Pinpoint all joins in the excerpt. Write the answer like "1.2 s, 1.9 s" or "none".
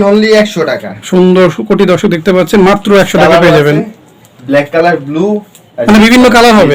1.0 s